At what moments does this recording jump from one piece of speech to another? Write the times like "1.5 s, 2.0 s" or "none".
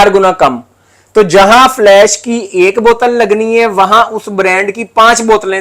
none